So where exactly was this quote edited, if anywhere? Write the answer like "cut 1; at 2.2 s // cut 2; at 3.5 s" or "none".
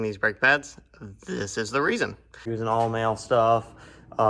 cut 1; at 2.5 s